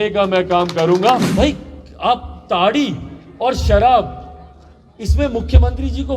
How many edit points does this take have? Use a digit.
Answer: 1